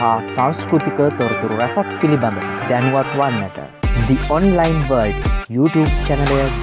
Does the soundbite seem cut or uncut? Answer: uncut